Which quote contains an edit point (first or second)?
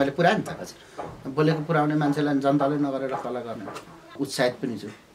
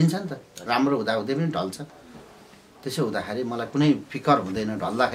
first